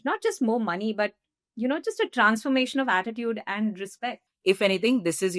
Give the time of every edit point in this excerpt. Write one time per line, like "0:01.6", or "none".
0:04.1